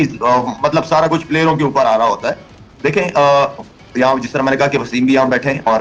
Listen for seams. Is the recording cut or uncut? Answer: uncut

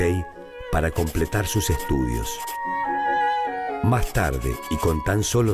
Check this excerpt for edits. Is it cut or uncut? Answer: cut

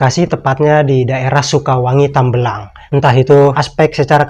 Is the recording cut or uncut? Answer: cut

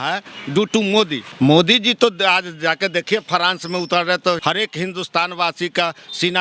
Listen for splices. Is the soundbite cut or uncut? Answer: cut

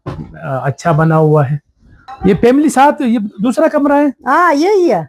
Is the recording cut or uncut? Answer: uncut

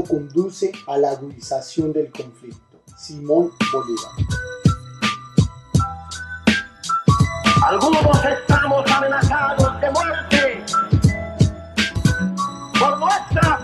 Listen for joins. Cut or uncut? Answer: cut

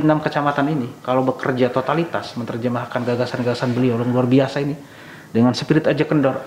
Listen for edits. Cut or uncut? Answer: uncut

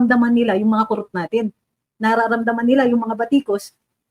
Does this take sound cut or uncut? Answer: uncut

